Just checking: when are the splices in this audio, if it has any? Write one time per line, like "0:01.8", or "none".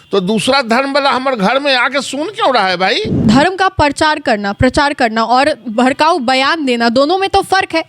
0:03.1